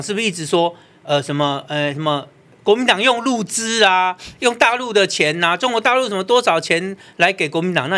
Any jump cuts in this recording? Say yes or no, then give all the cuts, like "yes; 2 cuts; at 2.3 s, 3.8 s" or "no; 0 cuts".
no; 0 cuts